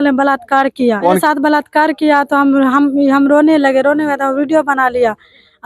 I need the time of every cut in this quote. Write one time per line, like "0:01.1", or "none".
0:01.2